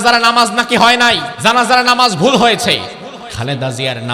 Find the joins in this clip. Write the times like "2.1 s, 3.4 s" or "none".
1.3 s, 3.2 s